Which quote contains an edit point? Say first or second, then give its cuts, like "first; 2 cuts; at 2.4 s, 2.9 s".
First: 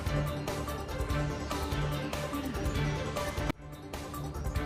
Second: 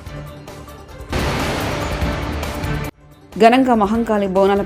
second; 2 cuts; at 1.1 s, 3.0 s